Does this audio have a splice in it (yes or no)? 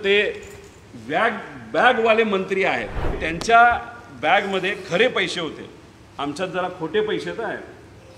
yes